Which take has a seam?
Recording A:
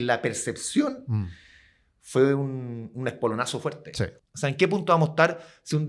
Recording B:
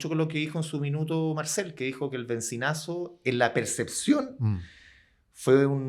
A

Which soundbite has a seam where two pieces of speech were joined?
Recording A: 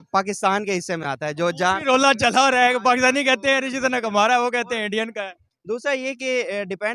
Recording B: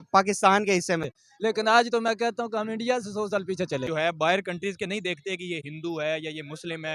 B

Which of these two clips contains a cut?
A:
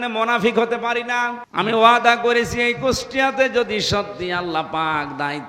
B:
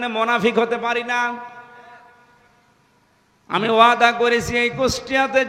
A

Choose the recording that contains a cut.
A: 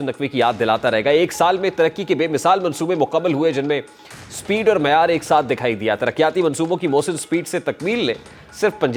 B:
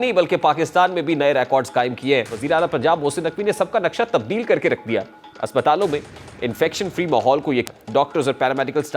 B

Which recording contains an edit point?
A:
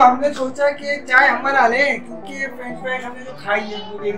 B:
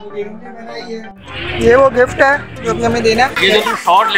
B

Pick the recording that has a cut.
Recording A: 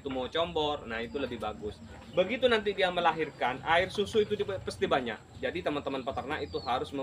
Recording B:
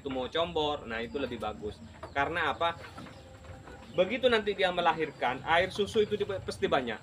A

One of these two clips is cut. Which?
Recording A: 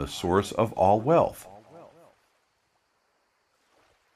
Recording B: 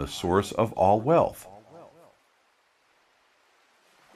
B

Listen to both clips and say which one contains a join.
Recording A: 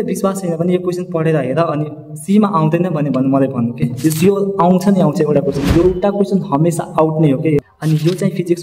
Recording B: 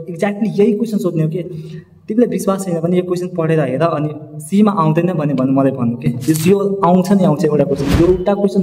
A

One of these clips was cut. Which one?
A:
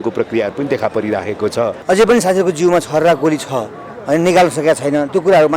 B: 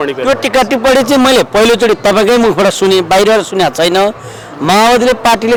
A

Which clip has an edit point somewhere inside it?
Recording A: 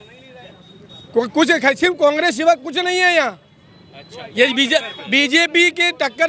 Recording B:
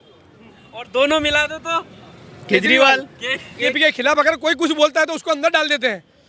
B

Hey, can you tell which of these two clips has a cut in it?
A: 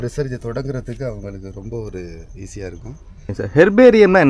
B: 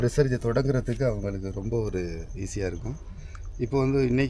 A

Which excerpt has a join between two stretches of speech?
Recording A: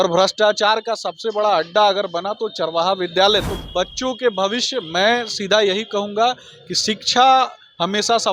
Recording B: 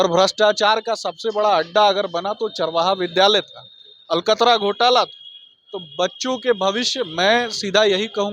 A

